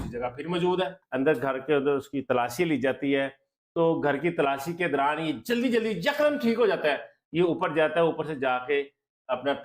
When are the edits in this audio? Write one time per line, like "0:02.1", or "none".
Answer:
0:01.0